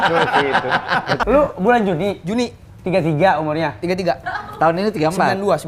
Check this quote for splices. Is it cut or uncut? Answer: cut